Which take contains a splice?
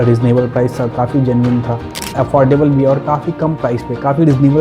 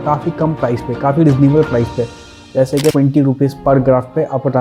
first; 1 cut; at 2.1 s

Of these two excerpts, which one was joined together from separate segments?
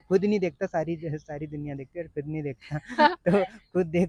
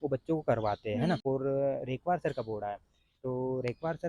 second; 1 cut; at 1.2 s

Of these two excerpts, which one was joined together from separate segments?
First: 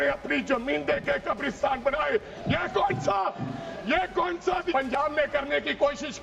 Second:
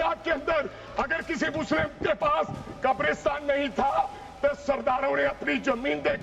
first; 1 cut; at 4.7 s

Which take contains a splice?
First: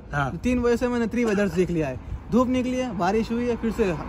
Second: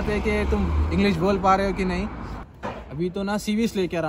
second; 1 cut; at 2.4 s

